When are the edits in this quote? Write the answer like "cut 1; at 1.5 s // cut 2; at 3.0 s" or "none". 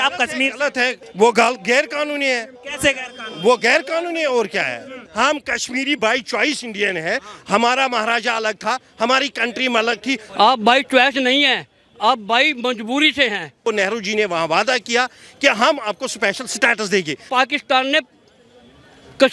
cut 1; at 1.0 s // cut 2; at 5.0 s // cut 3; at 10.2 s // cut 4; at 13.6 s // cut 5; at 17.2 s